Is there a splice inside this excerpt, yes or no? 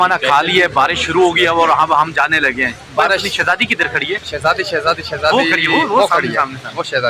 no